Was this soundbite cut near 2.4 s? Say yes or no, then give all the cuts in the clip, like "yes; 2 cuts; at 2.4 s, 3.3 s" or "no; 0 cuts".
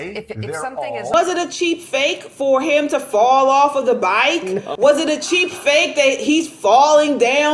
no; 2 cuts; at 1.2 s, 4.6 s